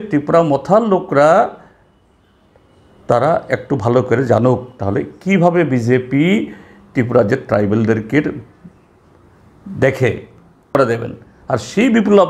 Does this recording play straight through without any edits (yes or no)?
no